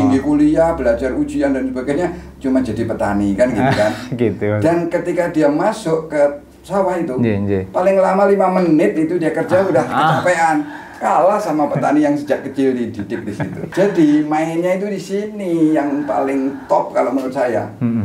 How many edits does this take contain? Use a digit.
1